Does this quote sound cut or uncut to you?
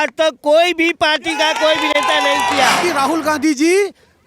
cut